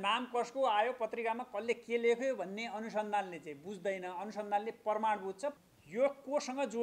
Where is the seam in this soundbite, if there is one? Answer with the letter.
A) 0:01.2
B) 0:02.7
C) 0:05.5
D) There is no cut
C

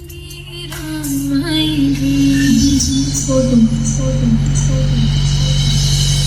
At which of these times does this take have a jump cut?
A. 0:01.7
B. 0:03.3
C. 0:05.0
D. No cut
D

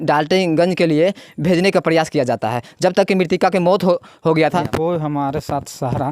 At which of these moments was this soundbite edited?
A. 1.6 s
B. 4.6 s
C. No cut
B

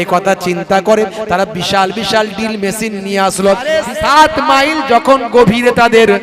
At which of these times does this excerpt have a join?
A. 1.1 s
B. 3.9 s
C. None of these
B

